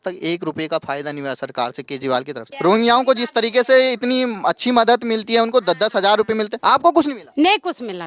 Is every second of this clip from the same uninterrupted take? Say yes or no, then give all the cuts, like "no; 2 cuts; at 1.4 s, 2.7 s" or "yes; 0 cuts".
no; 3 cuts; at 2.4 s, 6.5 s, 7.2 s